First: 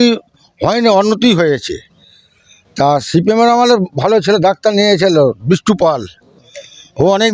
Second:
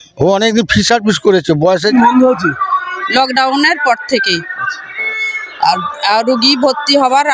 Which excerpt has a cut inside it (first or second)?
second